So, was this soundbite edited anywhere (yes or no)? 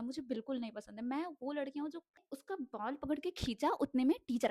yes